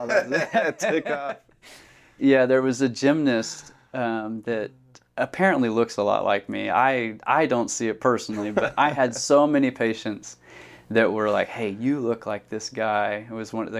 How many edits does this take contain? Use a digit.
1